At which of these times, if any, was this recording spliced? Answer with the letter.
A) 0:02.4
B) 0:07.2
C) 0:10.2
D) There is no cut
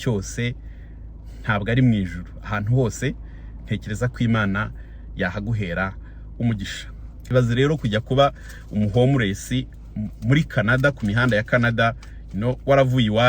B